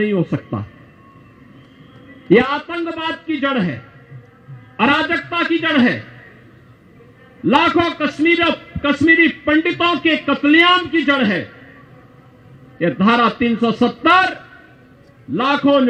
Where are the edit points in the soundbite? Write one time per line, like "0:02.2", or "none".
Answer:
none